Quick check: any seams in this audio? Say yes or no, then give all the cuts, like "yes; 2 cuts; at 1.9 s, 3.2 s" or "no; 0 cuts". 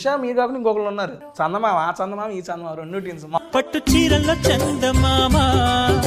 yes; 2 cuts; at 1.2 s, 3.4 s